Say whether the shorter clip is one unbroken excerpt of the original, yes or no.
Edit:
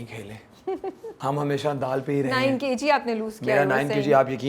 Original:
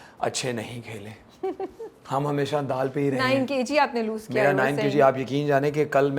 no